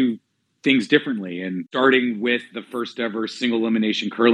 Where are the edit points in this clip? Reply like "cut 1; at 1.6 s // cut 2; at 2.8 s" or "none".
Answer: cut 1; at 1.7 s